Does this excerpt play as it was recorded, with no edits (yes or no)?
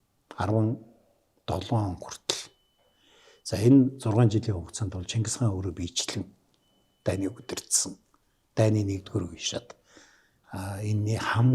yes